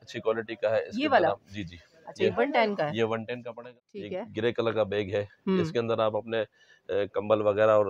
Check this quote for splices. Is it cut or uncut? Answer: cut